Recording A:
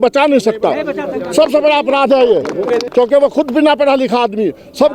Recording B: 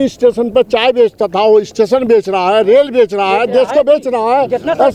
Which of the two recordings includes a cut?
A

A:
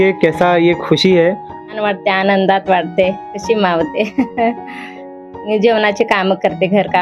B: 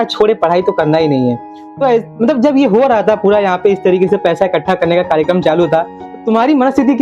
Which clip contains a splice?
A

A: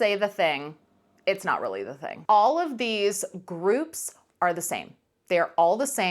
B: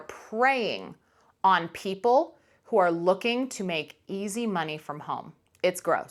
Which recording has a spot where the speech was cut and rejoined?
A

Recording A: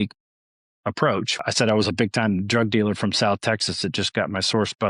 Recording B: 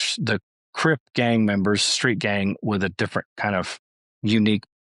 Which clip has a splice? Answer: A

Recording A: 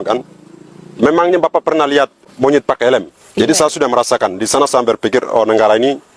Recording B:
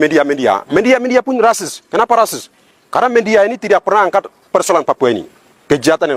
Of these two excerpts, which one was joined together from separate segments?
A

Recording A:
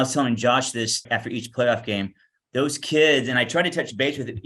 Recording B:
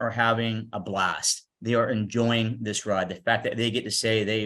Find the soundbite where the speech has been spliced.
A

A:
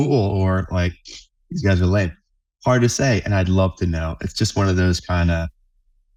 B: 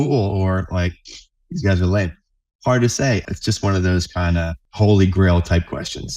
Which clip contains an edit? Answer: B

